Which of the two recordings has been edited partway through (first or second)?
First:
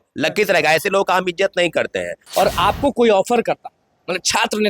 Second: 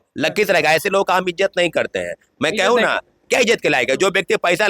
first